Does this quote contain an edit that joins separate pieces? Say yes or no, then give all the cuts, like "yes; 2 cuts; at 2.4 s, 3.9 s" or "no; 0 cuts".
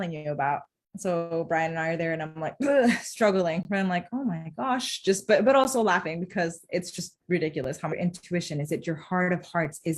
yes; 1 cut; at 7.9 s